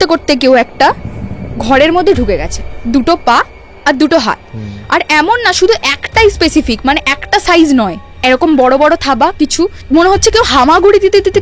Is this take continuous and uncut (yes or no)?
no